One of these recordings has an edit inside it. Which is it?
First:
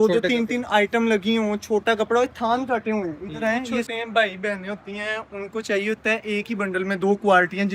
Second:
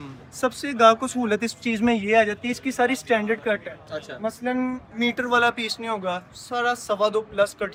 first; 1 cut; at 3.9 s

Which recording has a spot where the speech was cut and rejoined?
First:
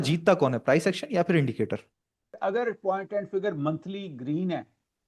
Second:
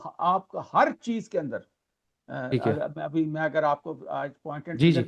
first; 1 cut; at 2.4 s

